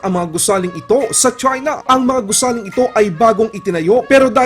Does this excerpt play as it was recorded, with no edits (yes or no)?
no